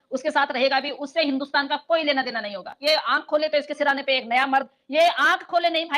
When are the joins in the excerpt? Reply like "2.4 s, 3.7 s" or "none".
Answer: 2.7 s